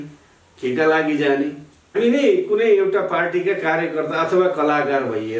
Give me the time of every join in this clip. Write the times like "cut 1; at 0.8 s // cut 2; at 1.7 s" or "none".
cut 1; at 1.9 s